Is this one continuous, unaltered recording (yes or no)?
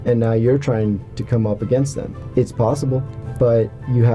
no